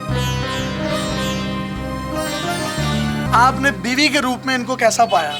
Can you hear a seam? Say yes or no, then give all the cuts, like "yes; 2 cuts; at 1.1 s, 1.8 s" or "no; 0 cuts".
yes; 1 cut; at 3.3 s